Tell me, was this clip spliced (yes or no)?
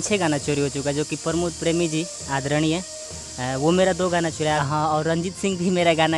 yes